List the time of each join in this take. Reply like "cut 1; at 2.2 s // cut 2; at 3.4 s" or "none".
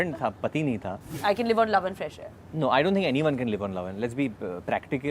cut 1; at 1.1 s